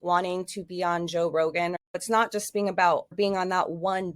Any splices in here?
yes; 2 cuts; at 2.0 s, 3.1 s

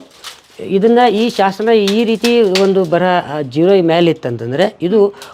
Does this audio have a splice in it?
no; 0 cuts

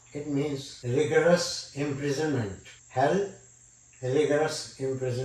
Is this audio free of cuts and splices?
yes; 0 cuts

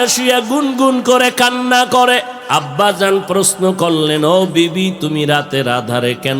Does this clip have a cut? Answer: yes; 1 cut; at 2.4 s

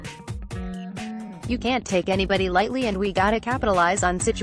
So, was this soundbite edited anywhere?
yes; 1 cut; at 1.6 s

